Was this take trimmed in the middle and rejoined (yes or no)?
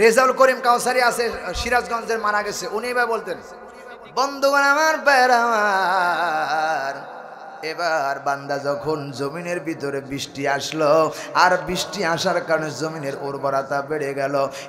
no